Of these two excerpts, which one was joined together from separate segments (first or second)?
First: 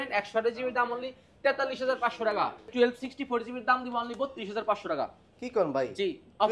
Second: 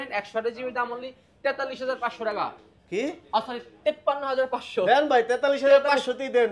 first